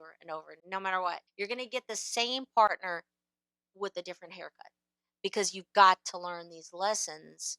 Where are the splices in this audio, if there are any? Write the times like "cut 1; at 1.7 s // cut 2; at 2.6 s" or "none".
cut 1; at 1.3 s